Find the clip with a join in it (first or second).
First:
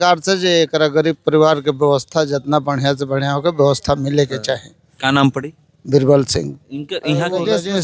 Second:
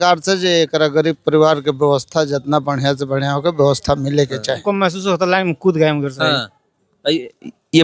second